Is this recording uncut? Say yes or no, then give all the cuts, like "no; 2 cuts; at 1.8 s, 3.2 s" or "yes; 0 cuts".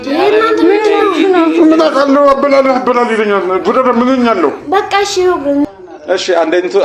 no; 1 cut; at 5.7 s